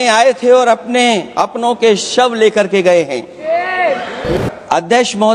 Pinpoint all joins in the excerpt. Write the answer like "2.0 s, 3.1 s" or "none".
4.4 s